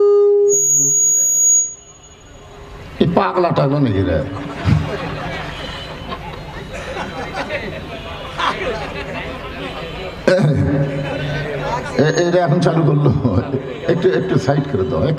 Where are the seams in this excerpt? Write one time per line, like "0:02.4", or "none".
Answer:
none